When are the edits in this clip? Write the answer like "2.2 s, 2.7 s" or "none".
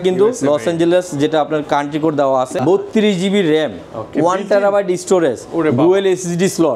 2.5 s